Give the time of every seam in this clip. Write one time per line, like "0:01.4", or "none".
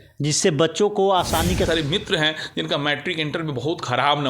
0:01.7